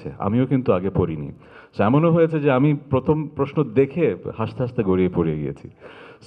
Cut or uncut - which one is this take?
uncut